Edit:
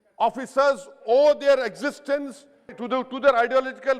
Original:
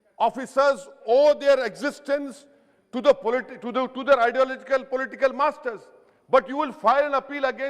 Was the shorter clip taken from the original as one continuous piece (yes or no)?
no